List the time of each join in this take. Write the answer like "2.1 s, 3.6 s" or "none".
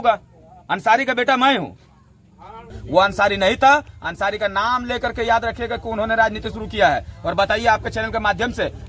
2.8 s